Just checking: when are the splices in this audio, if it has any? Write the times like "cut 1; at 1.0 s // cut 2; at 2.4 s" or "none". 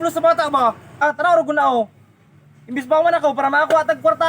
cut 1; at 1.0 s

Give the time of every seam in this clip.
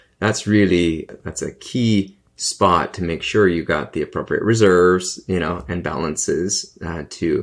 cut 1; at 1.2 s

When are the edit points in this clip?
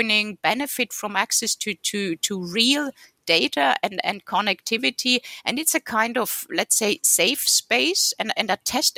none

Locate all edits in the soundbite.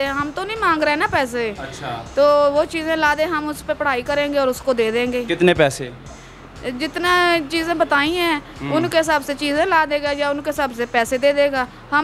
none

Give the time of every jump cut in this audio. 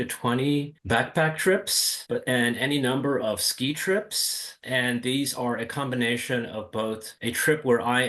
none

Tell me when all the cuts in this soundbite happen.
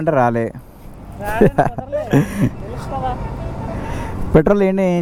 none

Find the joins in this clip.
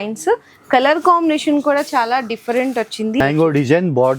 cut 1; at 3.2 s

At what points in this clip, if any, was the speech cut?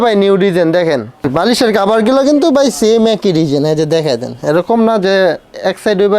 cut 1; at 1.3 s

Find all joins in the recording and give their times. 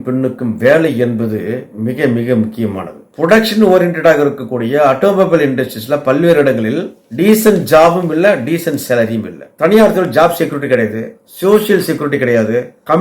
cut 1; at 3.0 s // cut 2; at 9.4 s

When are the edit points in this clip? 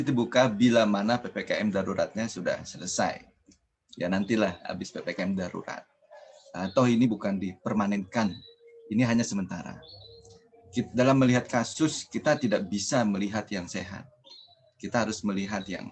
none

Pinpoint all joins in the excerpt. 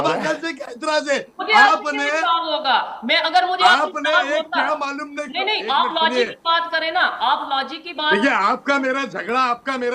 none

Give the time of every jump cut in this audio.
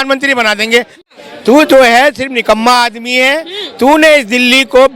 cut 1; at 0.9 s

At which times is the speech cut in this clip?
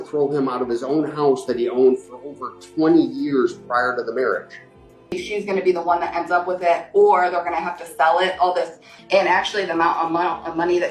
cut 1; at 5.2 s // cut 2; at 8.9 s

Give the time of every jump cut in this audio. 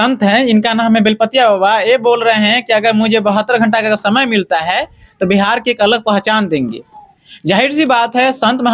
none

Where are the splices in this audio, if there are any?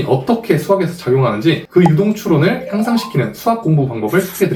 none

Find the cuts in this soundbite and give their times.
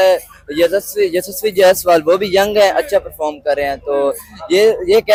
none

